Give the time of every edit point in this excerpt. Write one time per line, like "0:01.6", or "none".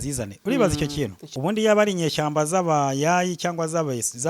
0:01.2

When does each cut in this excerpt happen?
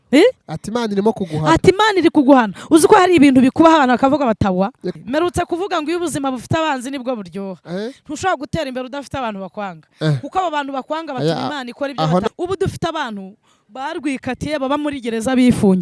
0:04.9
0:12.2

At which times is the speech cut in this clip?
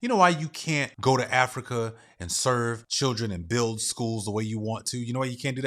0:00.9
0:02.9

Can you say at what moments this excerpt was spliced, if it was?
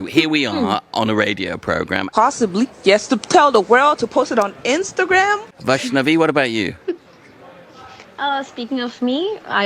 0:02.1
0:05.5

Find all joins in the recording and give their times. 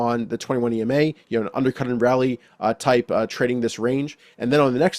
none

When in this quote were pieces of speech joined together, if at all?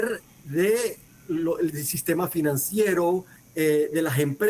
0:01.1
0:03.4

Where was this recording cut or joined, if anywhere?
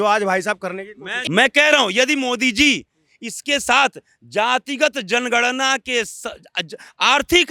0:01.1

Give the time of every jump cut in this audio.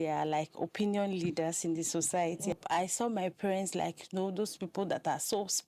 0:02.6

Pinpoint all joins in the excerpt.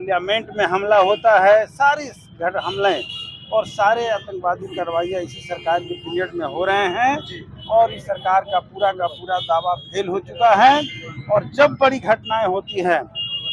none

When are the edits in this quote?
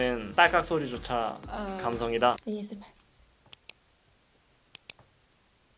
none

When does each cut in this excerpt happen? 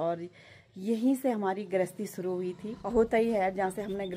0:02.7

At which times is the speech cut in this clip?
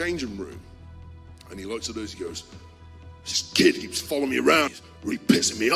0:04.8

